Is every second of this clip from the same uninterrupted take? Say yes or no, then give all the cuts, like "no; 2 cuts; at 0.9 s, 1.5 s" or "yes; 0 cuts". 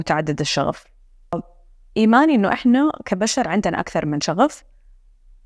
no; 1 cut; at 1.3 s